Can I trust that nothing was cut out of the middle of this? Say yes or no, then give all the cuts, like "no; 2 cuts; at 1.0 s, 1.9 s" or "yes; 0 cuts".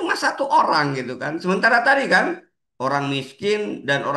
yes; 0 cuts